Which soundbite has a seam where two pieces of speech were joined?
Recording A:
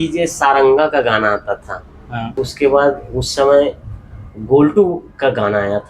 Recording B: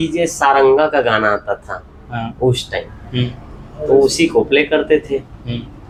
A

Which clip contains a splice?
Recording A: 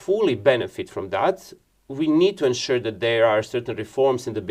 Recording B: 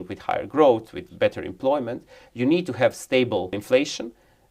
B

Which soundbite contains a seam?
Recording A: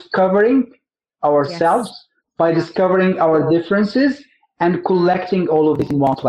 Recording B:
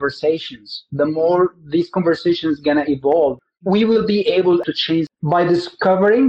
B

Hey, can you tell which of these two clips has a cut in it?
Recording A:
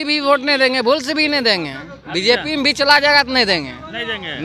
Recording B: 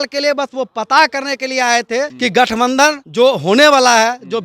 B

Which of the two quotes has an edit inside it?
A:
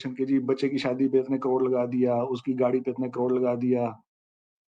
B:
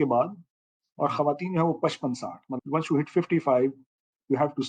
B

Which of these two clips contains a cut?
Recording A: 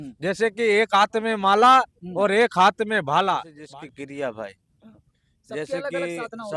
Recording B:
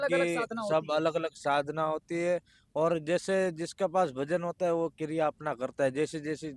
A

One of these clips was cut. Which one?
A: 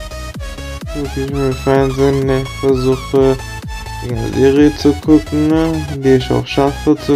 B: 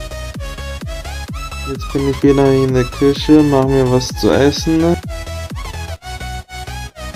A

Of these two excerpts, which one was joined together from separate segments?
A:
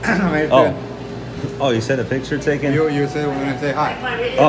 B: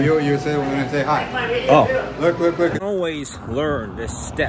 B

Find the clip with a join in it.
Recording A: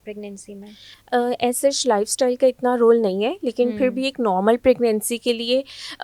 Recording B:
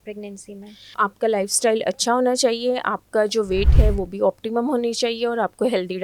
B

